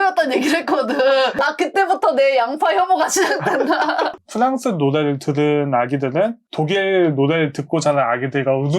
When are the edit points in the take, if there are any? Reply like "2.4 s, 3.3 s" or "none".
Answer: 1.4 s, 4.1 s